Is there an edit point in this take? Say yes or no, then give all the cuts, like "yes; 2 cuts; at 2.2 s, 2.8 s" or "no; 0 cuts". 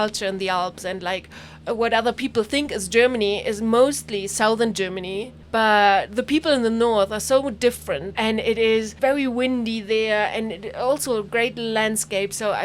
yes; 3 cuts; at 5.4 s, 8.2 s, 8.9 s